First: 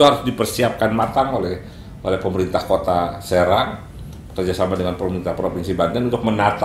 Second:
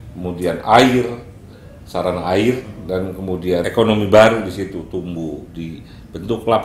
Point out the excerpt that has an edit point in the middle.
second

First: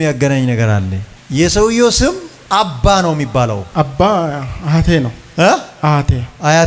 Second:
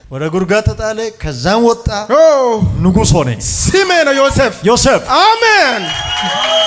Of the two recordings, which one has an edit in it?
second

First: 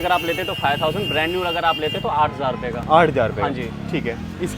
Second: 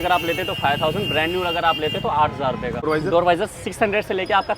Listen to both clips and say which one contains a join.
second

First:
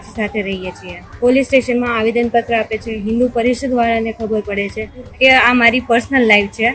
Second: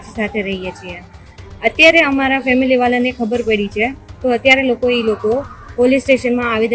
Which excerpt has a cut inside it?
first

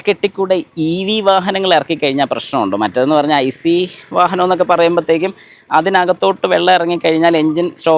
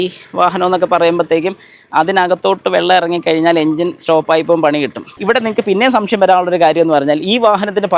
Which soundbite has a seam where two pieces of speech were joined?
second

